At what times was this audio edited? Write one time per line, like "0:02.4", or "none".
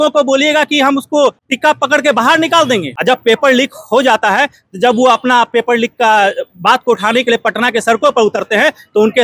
0:01.5
0:02.9